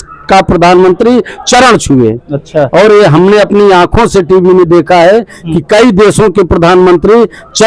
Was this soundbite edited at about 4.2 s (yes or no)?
no